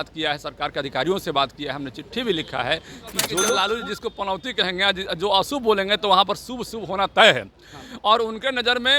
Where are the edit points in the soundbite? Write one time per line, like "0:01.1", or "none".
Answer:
0:03.5